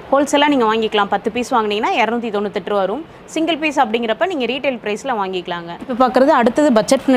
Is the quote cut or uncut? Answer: uncut